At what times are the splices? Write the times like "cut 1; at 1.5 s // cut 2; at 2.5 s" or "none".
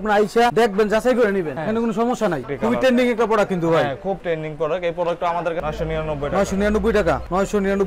cut 1; at 2.5 s // cut 2; at 5.6 s